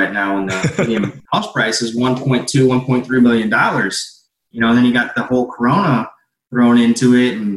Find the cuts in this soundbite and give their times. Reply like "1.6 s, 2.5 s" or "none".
1.2 s